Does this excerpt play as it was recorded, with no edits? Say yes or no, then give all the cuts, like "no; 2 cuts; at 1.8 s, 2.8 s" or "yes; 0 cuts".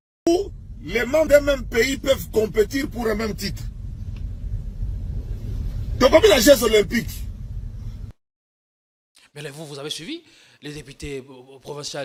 yes; 0 cuts